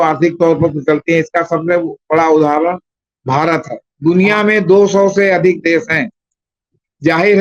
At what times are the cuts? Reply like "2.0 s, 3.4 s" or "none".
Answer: 3.8 s